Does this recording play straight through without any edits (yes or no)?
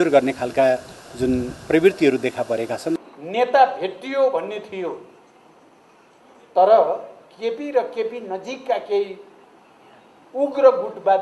no